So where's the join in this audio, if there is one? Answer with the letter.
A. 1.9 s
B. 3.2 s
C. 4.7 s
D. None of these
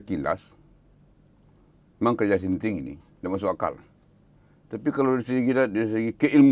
D